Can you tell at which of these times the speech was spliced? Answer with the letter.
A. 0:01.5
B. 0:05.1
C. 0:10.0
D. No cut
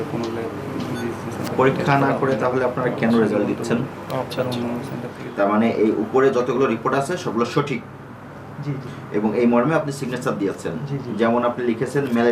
B